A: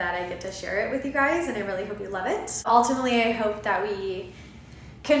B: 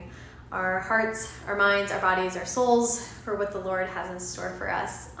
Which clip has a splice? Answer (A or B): A